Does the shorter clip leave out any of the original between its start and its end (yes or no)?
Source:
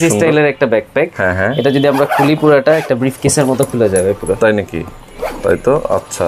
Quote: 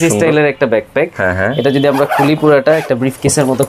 no